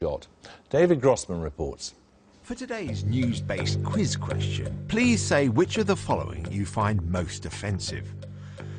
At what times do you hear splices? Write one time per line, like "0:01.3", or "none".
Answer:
none